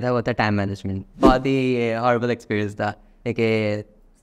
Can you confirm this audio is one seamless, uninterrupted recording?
no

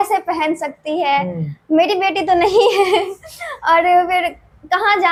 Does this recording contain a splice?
no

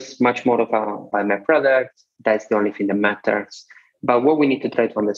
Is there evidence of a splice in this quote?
yes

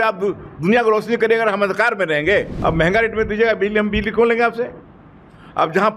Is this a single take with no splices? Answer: no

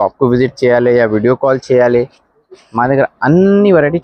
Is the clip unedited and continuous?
yes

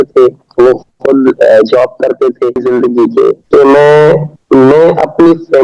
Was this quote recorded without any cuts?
no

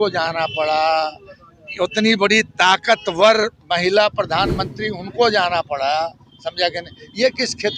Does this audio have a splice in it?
no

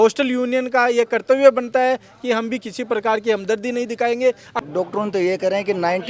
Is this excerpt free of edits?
no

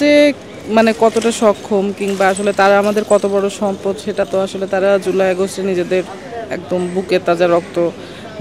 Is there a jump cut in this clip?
no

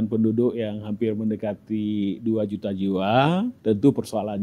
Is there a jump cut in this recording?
yes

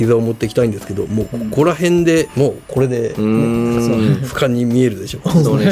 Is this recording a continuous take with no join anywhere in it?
no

